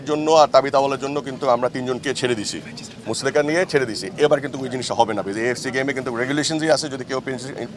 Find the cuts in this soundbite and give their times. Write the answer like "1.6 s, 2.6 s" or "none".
none